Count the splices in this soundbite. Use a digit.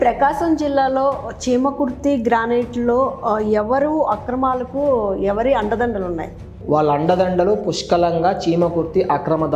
1